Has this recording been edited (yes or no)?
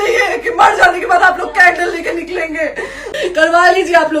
yes